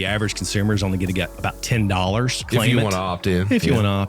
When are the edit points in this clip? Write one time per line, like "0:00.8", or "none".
0:01.3
0:02.4